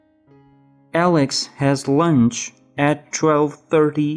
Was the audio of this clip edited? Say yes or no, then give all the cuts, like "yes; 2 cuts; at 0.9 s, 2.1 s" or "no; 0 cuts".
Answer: yes; 1 cut; at 0.9 s